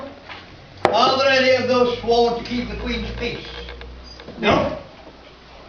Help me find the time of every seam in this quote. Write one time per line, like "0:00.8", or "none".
0:01.0